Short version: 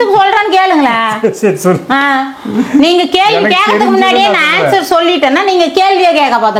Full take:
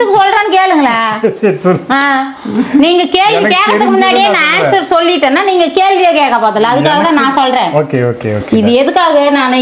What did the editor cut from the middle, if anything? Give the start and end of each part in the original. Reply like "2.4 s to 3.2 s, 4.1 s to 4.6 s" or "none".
none